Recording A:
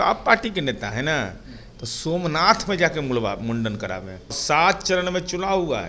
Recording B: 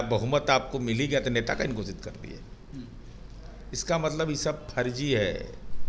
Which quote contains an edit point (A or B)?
A